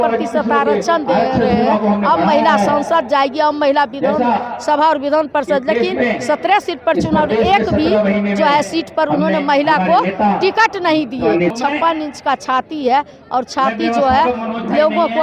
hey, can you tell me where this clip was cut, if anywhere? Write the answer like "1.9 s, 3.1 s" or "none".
11.5 s